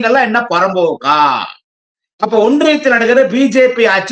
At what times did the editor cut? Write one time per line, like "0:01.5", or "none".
none